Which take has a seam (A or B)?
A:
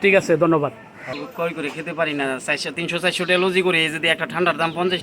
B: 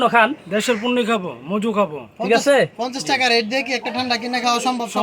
A